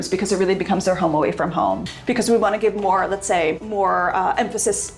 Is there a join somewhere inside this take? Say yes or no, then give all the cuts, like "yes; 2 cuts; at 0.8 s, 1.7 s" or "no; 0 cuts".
yes; 2 cuts; at 1.9 s, 3.6 s